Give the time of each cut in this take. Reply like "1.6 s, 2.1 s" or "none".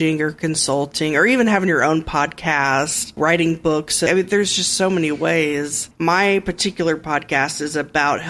3.1 s, 4.1 s, 5.9 s